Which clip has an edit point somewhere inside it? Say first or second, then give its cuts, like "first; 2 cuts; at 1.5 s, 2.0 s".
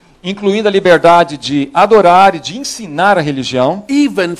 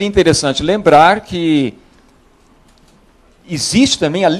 first; 1 cut; at 3.4 s